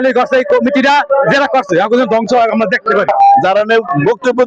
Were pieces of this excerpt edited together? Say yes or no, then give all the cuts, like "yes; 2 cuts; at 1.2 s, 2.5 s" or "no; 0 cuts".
yes; 1 cut; at 3.1 s